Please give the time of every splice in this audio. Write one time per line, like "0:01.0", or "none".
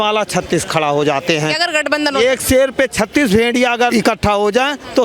0:01.6
0:03.9

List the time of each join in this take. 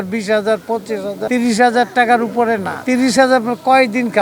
none

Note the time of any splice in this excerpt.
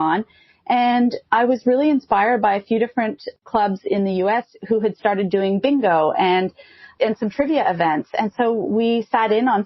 none

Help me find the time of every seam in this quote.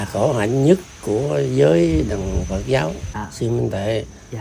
0:03.2

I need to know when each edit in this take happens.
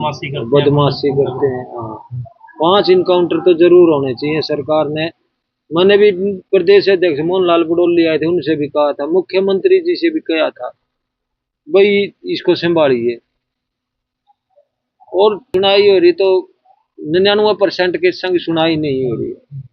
0:15.5

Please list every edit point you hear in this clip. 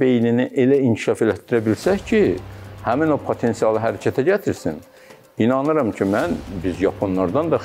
none

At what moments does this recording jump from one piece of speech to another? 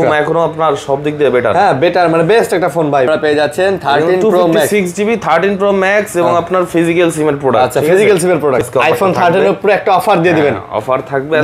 0:03.1
0:08.6

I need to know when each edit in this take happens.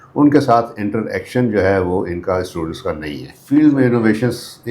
0:03.3

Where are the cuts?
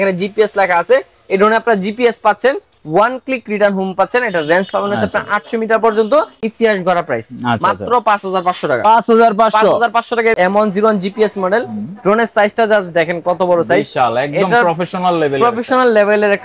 0:06.5
0:10.4

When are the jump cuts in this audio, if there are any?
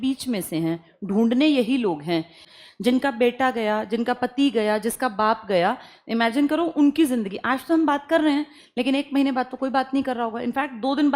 0:02.4

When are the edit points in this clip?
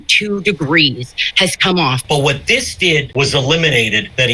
0:02.0

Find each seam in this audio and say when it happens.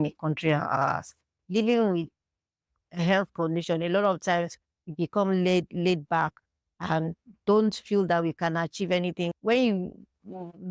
0:01.3
0:09.4

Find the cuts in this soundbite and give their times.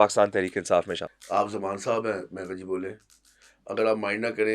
0:01.1

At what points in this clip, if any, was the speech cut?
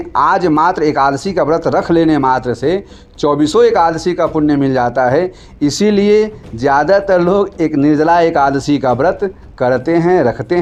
none

